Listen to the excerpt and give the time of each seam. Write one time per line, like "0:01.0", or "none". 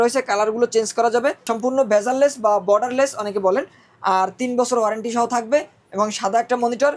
0:01.5